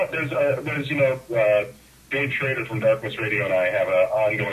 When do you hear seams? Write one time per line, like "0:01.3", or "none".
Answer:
0:01.2